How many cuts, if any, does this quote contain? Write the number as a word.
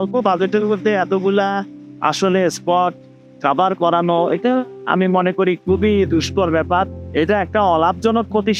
zero